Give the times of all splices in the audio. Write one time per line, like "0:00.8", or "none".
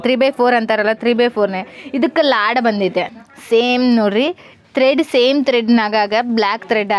0:03.1